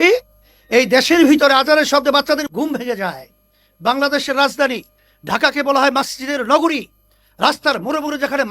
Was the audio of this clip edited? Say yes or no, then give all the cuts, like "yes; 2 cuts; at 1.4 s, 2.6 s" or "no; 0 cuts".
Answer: yes; 1 cut; at 2.4 s